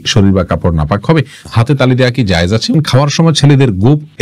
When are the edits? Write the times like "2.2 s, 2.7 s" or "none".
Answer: 1.5 s, 2.7 s